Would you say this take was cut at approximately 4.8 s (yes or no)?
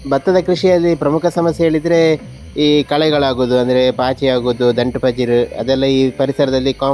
no